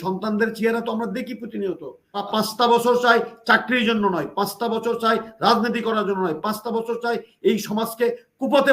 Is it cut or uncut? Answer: cut